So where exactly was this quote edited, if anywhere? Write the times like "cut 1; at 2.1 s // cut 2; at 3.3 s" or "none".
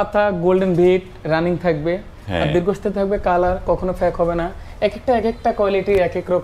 none